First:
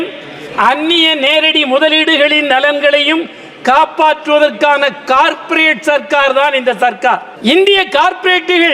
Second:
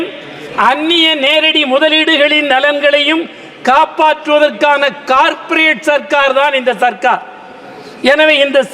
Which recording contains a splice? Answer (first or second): first